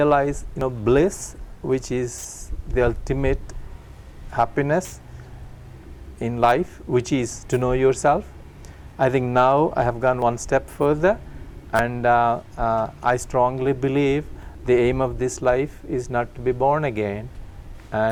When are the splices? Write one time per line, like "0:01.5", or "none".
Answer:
none